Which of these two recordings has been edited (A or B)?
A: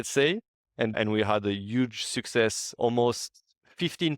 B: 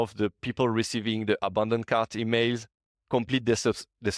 A